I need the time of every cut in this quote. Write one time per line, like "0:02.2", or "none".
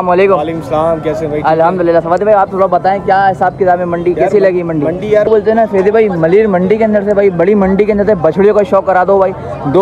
0:05.3

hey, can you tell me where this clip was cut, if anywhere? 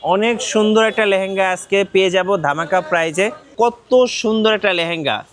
0:03.4

